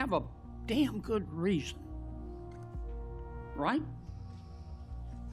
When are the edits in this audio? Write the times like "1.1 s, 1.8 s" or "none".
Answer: none